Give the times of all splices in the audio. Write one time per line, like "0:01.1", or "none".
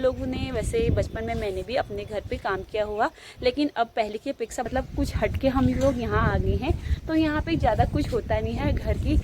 0:04.7